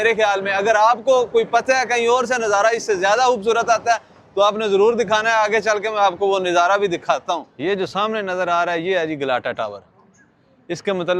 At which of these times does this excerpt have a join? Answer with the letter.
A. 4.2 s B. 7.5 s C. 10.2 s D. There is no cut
B